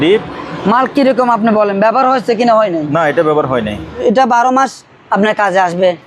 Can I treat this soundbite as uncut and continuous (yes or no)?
no